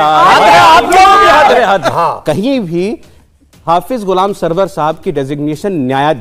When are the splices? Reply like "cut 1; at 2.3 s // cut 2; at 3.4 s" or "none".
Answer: cut 1; at 1.9 s

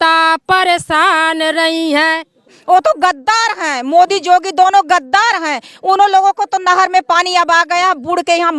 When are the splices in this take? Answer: cut 1; at 2.5 s

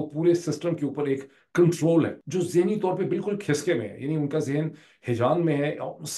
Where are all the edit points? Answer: none

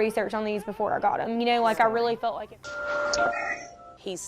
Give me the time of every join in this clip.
cut 1; at 2.1 s

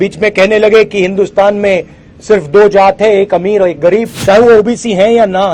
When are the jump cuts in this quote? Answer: cut 1; at 4.1 s

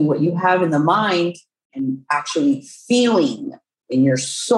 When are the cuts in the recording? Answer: cut 1; at 1.7 s

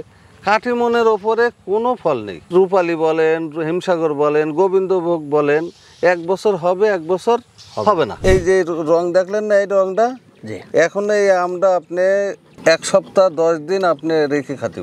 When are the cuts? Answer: cut 1; at 2.4 s // cut 2; at 8.2 s

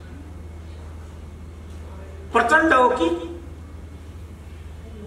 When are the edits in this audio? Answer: none

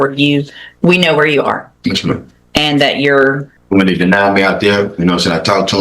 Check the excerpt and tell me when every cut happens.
cut 1; at 3.5 s

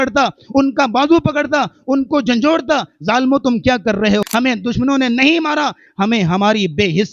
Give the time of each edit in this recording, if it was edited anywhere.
cut 1; at 4.2 s

